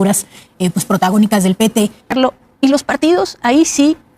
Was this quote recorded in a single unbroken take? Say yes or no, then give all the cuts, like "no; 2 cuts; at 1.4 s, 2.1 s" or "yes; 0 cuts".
no; 1 cut; at 2.1 s